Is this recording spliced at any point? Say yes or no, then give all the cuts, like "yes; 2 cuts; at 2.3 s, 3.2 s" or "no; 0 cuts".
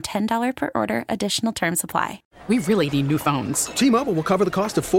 yes; 1 cut; at 2.3 s